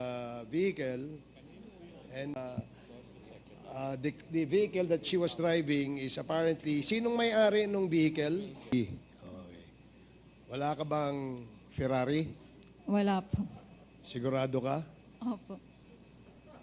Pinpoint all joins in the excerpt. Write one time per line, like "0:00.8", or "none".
0:02.4
0:08.7

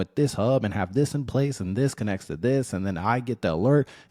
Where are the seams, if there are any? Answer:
none

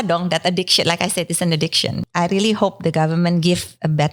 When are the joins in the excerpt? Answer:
0:02.0

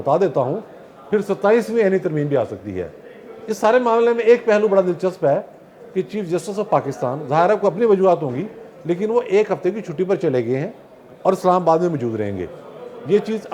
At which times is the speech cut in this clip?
none

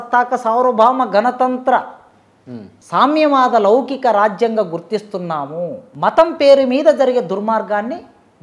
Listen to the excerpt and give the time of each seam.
0:05.8

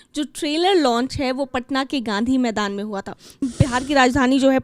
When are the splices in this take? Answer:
0:03.4

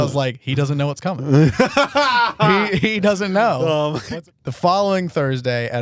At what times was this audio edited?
0:04.0

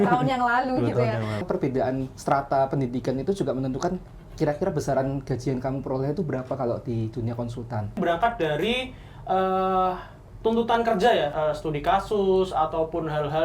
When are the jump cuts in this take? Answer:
0:01.4
0:08.0
0:11.3

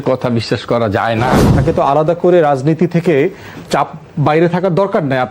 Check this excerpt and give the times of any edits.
0:01.6

